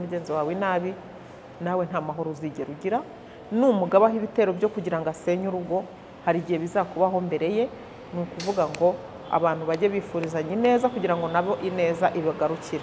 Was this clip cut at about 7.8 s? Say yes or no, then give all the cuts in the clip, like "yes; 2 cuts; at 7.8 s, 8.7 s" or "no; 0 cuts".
no; 0 cuts